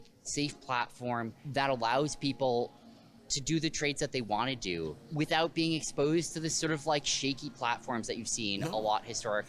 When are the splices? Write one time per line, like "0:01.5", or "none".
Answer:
0:01.4
0:05.0